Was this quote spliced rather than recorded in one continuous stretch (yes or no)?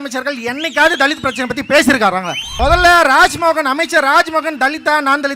yes